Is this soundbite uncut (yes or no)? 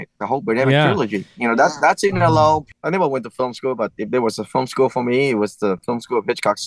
no